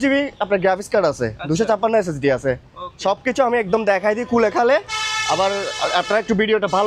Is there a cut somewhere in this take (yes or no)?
no